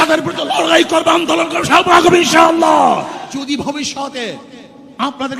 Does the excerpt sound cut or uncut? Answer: cut